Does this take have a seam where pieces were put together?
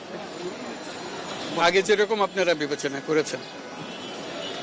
no; 0 cuts

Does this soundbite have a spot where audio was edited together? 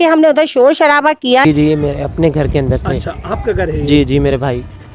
yes; 1 cut; at 1.4 s

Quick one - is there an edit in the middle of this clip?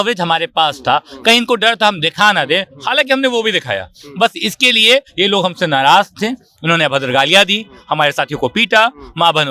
no; 0 cuts

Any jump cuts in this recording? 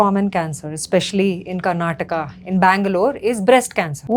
no; 0 cuts

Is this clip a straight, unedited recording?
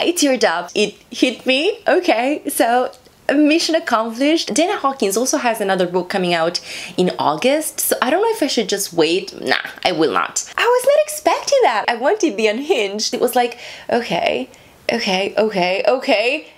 no; 3 cuts; at 4.5 s, 10.6 s, 13.1 s

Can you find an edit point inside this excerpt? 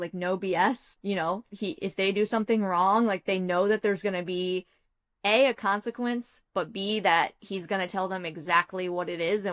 yes; 1 cut; at 0.9 s

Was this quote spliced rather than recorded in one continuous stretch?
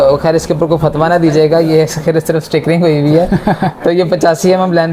no; 0 cuts

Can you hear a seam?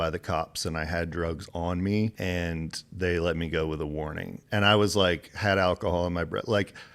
yes; 1 cut; at 2.2 s

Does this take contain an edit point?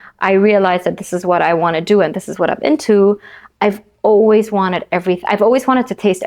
no; 0 cuts

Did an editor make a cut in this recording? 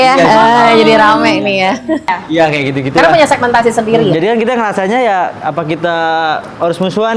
yes; 1 cut; at 2.1 s

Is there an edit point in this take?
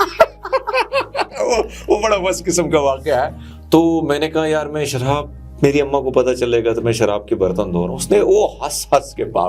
yes; 1 cut; at 3.4 s

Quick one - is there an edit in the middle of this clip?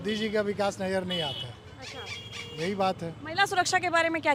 no; 0 cuts

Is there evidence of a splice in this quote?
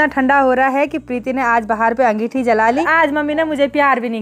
yes; 1 cut; at 2.9 s

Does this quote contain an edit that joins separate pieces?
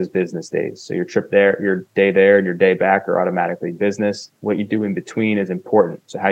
no; 0 cuts

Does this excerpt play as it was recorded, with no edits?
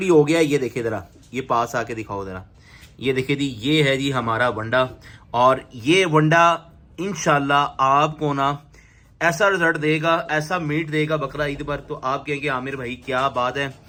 yes; 0 cuts

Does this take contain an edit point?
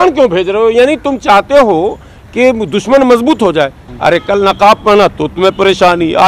yes; 1 cut; at 3.8 s

